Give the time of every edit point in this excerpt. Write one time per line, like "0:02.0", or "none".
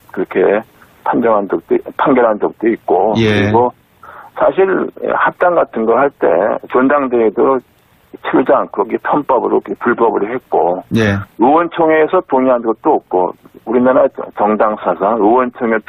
none

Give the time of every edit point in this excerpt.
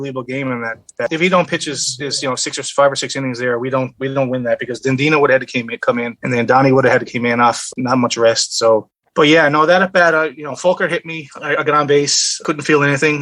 0:01.1

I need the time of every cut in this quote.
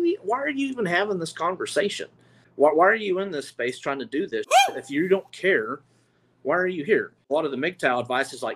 0:02.4
0:07.2

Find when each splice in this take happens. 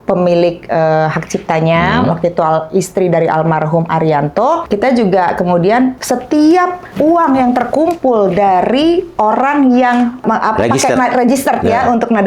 0:04.6
0:06.0
0:06.9
0:10.2

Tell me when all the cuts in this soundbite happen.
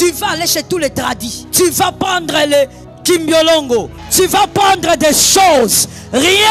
0:01.4
0:02.9
0:04.0

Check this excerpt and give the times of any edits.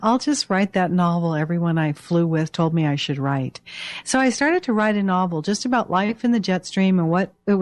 0:02.7

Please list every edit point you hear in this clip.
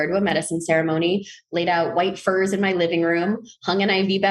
none

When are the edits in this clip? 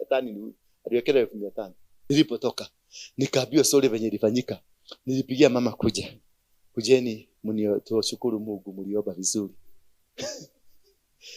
0:02.1

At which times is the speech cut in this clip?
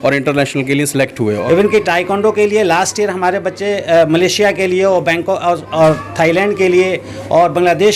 0:01.2

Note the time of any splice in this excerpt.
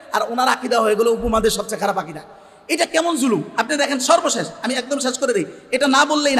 none

